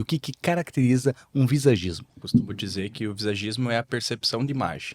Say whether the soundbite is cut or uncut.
cut